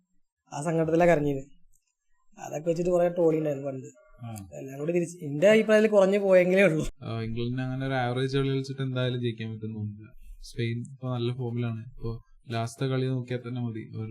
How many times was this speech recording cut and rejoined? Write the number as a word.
one